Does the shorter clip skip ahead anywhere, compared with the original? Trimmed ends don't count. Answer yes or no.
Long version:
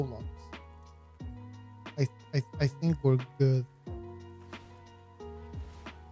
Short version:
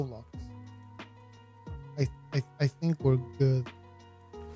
yes